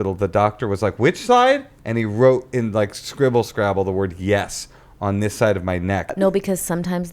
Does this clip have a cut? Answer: yes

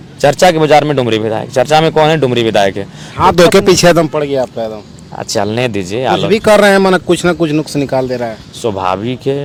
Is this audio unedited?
yes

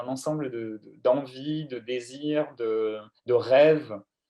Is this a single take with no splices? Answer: yes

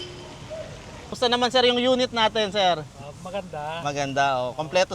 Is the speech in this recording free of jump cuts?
no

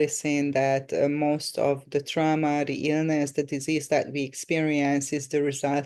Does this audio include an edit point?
no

